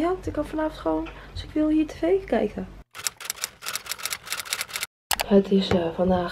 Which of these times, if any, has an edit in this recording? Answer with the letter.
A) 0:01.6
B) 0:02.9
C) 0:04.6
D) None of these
D